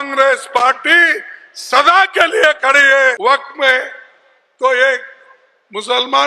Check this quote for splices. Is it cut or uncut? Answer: cut